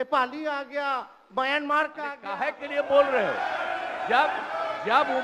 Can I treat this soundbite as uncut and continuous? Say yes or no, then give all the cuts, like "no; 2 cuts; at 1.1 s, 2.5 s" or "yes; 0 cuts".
no; 1 cut; at 2.2 s